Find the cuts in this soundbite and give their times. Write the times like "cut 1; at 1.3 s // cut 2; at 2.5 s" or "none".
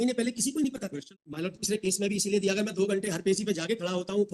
cut 1; at 1.1 s

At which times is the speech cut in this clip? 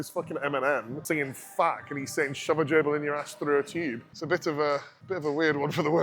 cut 1; at 0.9 s // cut 2; at 4.1 s // cut 3; at 5.0 s

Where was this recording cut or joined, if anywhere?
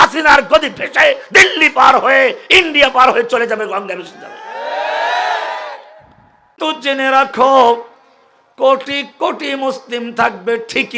cut 1; at 6.6 s

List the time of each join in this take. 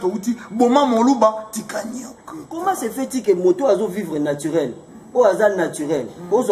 cut 1; at 2.5 s

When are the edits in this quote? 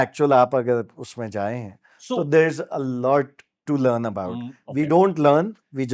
none

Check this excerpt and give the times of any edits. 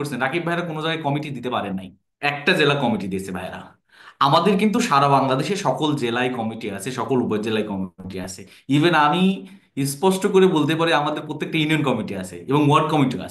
none

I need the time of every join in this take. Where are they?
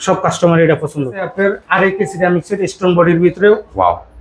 cut 1; at 1.3 s

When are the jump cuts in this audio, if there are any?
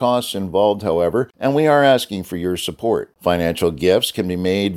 cut 1; at 1.3 s

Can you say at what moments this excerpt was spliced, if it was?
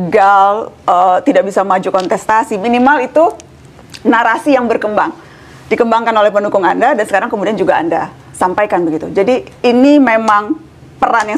none

